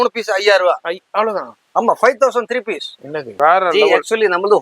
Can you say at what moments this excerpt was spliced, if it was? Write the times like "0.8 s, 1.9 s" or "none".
3.3 s